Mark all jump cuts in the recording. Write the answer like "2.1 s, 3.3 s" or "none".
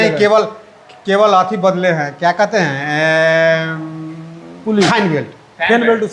none